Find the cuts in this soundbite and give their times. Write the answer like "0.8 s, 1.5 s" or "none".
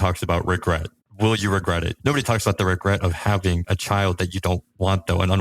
1.9 s